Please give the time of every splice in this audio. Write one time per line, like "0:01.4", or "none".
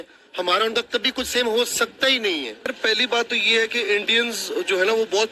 0:02.7